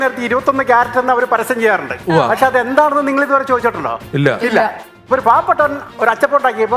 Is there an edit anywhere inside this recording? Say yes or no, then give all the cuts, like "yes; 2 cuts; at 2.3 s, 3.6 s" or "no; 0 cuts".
no; 0 cuts